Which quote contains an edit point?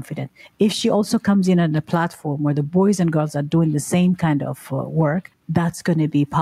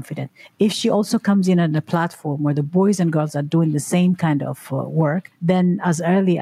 first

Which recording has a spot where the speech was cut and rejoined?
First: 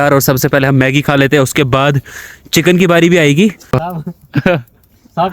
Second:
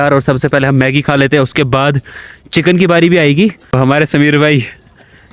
first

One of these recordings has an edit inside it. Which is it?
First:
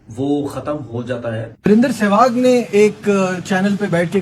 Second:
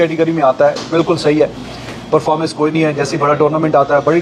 first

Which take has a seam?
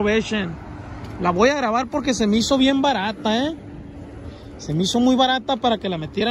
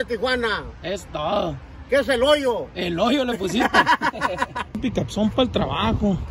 second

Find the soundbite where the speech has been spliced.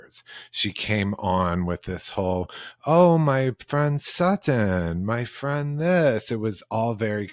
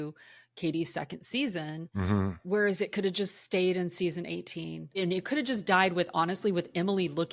second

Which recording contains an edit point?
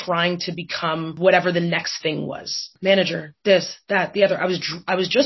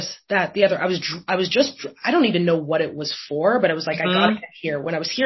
first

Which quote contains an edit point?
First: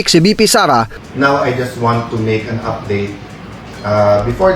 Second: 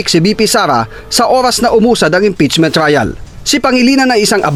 first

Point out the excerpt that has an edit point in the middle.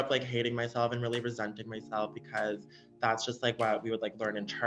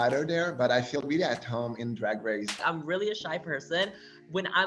second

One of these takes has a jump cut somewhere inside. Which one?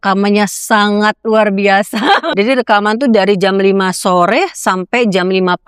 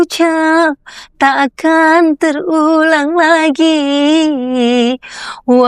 first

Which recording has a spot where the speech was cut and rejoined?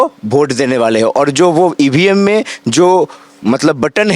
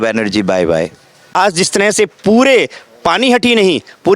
second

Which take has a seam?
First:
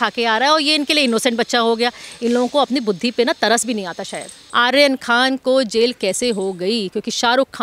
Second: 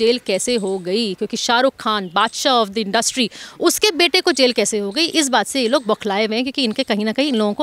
first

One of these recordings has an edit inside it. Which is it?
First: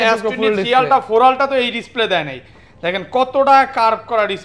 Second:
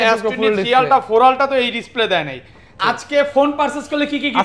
second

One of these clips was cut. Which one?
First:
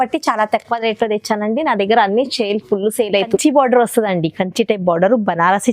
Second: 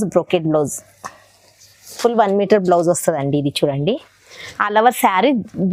first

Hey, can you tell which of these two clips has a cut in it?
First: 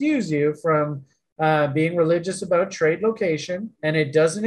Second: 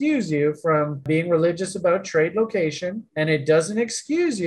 second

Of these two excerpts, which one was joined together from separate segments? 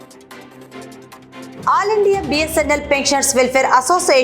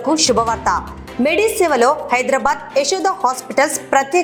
first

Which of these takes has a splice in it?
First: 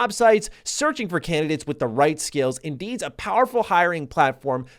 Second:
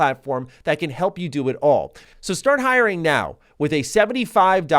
second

